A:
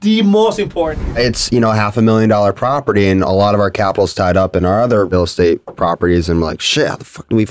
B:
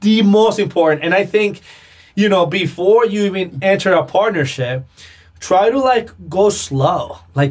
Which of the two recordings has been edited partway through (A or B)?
A